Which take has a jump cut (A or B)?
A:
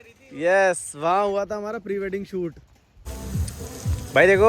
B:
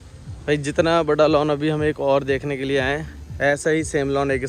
A